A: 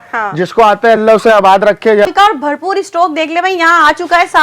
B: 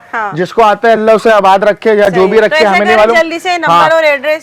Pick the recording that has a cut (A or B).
A